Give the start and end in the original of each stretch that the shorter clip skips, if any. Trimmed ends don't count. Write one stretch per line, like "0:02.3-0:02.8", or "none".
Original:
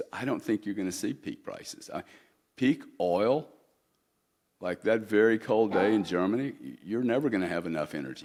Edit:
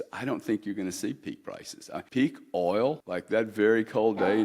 0:02.1-0:02.5
0:03.5-0:04.6